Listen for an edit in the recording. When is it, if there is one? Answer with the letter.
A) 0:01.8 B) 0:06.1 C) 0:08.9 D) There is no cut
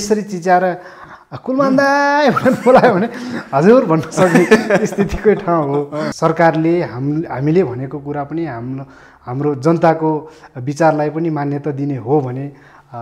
B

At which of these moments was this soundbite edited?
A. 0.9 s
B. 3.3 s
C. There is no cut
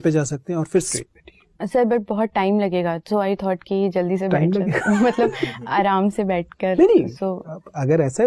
A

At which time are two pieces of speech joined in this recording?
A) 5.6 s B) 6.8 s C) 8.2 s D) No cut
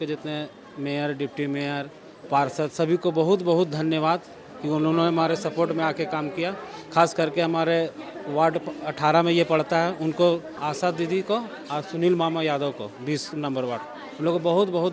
D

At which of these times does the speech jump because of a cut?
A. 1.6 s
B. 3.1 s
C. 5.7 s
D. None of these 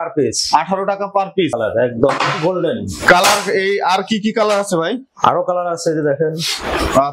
A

